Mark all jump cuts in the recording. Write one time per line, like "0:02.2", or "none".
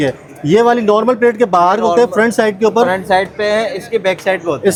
none